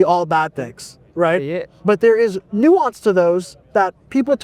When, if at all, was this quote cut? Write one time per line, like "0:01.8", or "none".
0:02.4